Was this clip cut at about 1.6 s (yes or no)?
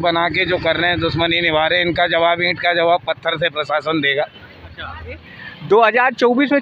no